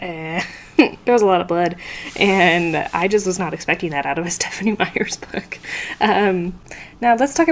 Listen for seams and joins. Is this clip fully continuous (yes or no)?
yes